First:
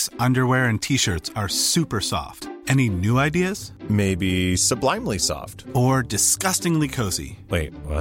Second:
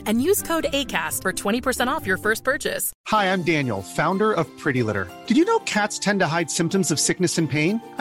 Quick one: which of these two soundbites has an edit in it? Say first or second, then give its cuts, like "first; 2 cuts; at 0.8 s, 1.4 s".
second; 1 cut; at 2.9 s